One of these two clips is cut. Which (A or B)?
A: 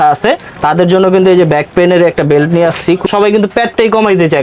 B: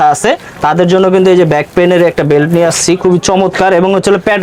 A